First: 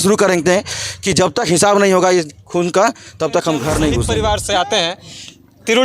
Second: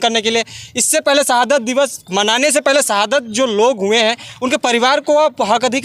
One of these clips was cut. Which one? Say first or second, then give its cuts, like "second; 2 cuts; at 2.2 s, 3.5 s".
first; 1 cut; at 4.1 s